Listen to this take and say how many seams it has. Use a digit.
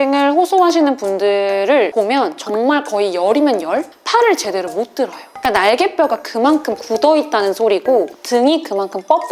2